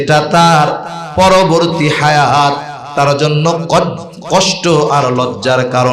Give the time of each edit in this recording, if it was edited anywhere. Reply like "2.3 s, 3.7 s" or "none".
2.9 s